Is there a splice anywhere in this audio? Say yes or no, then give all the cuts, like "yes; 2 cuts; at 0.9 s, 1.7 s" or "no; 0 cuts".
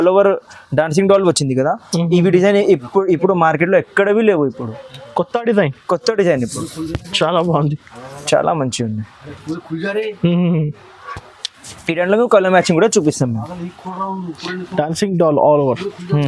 no; 0 cuts